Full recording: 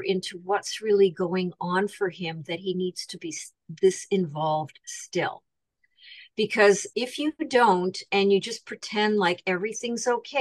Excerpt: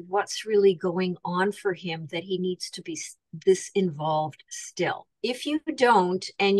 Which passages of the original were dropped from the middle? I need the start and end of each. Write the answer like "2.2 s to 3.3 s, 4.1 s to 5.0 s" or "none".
5.5 s to 6.9 s